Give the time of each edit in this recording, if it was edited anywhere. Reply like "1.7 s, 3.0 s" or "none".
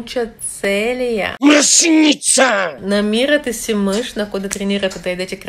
2.8 s